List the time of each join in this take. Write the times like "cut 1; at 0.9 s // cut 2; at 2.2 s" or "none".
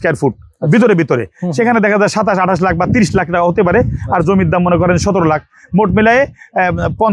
none